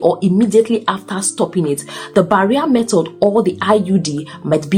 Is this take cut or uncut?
uncut